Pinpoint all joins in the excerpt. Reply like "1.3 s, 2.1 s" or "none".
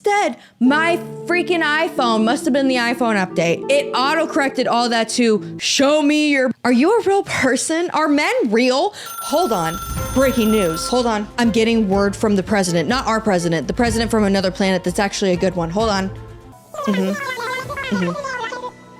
6.5 s